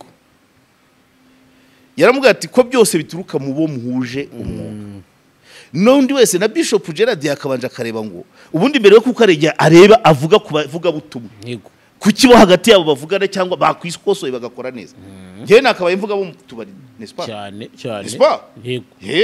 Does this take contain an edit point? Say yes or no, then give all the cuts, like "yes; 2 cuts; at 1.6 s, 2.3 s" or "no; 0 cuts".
no; 0 cuts